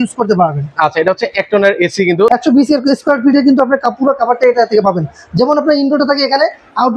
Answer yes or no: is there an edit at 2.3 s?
yes